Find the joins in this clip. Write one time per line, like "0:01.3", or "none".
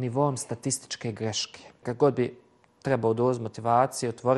0:01.8

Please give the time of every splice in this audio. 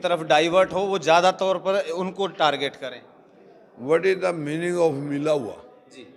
none

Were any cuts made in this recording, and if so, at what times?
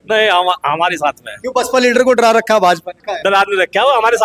0:03.2

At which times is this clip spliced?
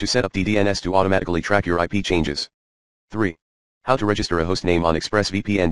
0:03.1

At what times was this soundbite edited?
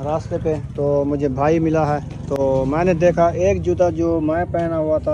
none

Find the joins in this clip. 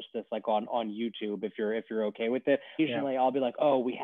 0:02.8

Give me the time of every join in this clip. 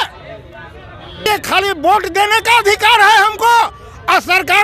0:01.3

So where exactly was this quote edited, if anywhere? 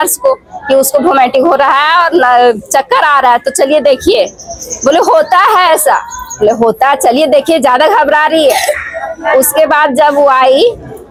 none

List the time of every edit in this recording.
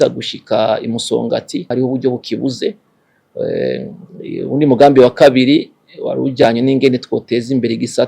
0:01.7

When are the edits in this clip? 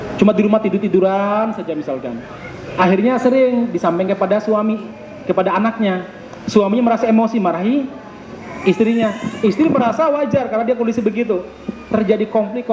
none

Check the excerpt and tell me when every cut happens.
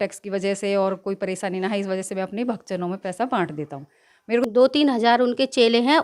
0:04.4

